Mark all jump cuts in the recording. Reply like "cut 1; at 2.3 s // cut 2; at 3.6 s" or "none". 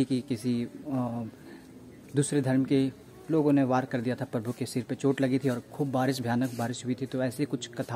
none

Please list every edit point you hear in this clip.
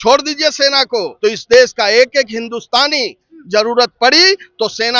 cut 1; at 1.1 s

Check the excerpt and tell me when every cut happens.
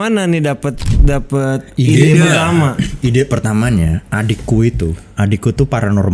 none

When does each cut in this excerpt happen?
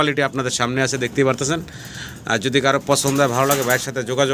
none

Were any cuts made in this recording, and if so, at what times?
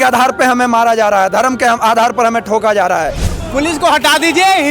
cut 1; at 3.3 s

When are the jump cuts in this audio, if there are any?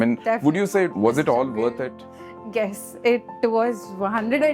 cut 1; at 0.9 s

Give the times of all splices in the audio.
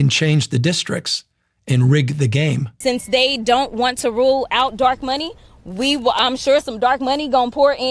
cut 1; at 2.7 s

